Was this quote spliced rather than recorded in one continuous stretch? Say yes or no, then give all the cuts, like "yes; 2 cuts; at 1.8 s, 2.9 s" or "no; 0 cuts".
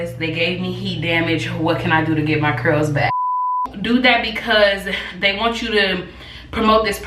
yes; 1 cut; at 3.7 s